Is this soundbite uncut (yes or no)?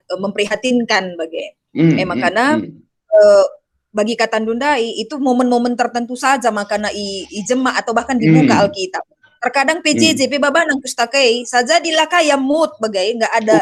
yes